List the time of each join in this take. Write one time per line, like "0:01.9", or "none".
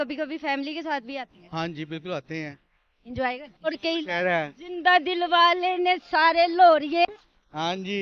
0:03.7